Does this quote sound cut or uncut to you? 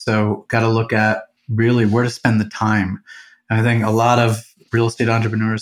cut